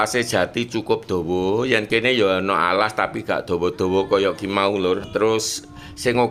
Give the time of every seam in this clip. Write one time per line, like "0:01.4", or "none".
none